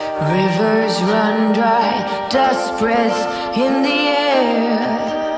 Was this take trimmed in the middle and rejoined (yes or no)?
no